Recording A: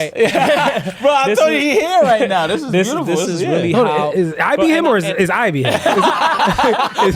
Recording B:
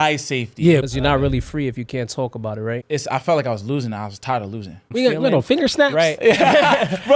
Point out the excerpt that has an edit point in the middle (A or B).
B